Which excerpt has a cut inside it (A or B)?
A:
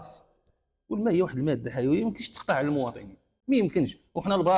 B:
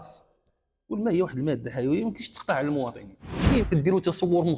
B